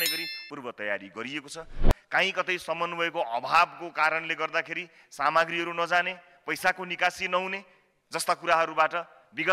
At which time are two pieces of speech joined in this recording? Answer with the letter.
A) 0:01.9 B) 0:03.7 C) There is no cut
A